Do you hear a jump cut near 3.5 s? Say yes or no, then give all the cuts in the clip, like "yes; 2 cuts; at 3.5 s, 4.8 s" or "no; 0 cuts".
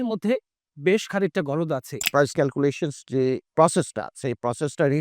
yes; 2 cuts; at 2.3 s, 3.5 s